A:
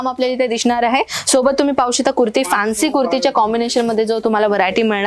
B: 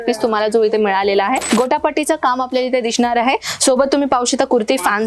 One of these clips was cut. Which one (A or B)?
B